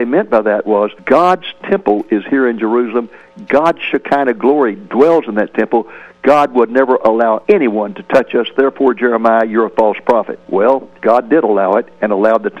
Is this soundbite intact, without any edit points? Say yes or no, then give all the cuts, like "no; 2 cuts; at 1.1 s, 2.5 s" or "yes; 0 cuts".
yes; 0 cuts